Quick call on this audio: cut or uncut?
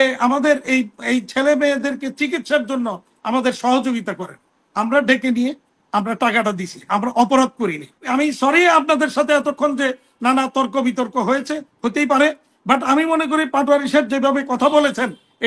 cut